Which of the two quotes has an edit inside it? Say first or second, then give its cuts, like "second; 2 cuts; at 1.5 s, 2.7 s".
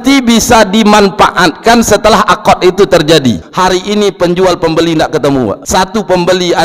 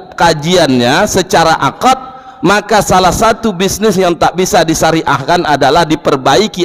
first; 2 cuts; at 3.5 s, 5.6 s